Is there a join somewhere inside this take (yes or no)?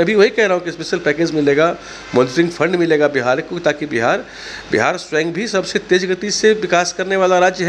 no